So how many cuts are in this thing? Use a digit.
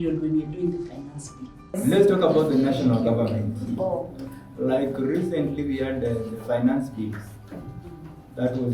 1